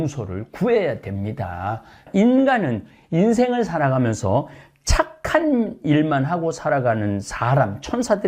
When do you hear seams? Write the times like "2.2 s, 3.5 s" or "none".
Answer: 2.0 s